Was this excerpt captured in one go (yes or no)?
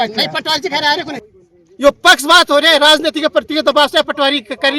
no